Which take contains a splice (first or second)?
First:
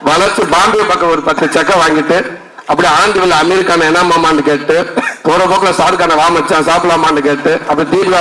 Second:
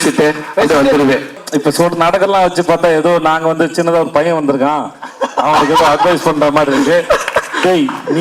second